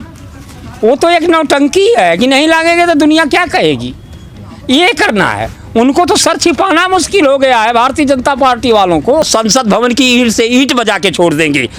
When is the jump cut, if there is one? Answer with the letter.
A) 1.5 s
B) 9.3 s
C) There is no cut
B